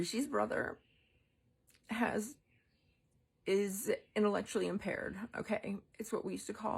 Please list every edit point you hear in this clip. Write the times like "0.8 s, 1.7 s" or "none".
4.8 s